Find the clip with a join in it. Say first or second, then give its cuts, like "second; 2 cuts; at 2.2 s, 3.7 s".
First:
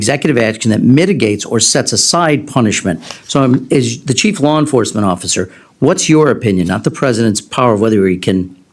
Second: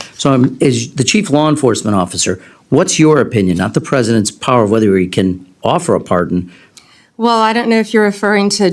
second; 1 cut; at 6.6 s